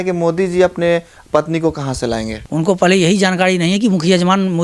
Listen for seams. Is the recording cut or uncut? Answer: cut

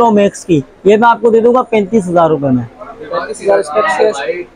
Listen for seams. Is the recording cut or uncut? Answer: uncut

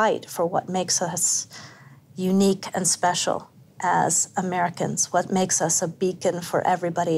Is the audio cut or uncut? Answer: uncut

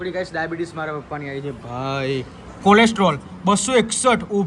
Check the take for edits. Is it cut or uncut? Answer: cut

